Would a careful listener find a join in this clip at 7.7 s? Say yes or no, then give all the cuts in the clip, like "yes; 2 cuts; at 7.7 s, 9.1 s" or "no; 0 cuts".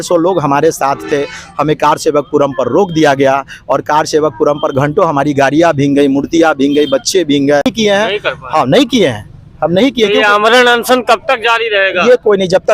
yes; 1 cut; at 7.7 s